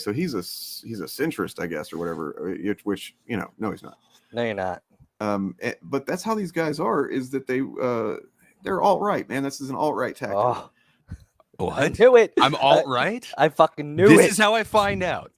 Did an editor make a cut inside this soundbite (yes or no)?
yes